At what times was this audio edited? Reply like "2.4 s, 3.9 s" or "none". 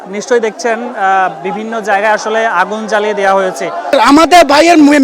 3.9 s